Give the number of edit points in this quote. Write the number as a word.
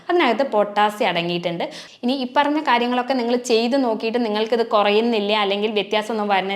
one